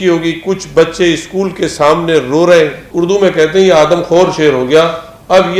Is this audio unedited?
no; 1 cut; at 2.9 s

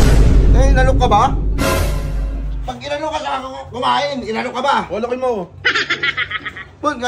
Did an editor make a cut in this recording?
no; 0 cuts

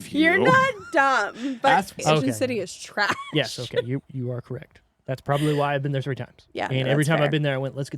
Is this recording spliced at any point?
yes; 1 cut; at 2.0 s

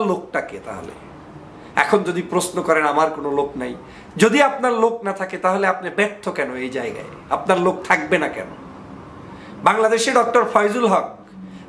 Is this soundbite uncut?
yes; 0 cuts

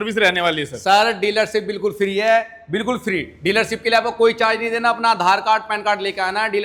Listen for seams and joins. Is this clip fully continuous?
yes; 0 cuts

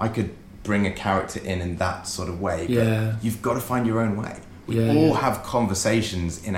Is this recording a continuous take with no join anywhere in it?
yes; 0 cuts

